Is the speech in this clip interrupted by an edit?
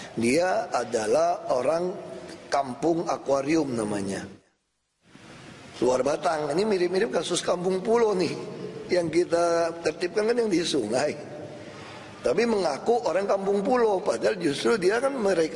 yes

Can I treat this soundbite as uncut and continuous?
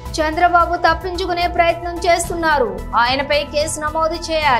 yes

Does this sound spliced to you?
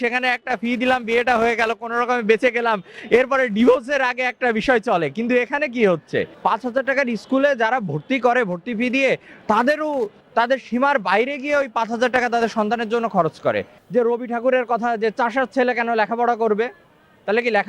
yes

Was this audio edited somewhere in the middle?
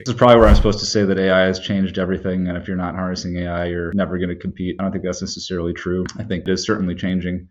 no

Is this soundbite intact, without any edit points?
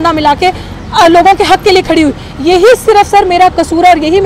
yes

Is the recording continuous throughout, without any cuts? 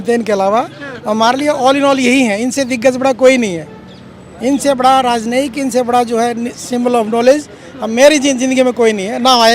yes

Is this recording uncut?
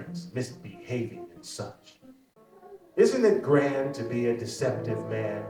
no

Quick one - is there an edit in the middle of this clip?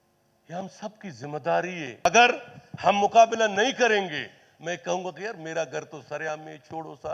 yes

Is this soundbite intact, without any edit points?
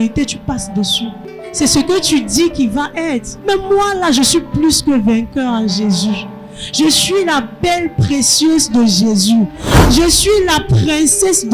no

